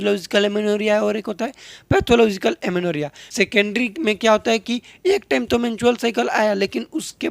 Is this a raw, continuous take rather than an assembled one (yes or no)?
no